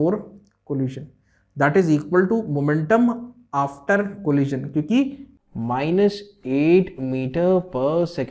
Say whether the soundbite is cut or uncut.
cut